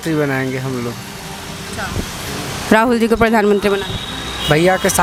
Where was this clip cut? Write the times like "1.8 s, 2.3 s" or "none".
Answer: none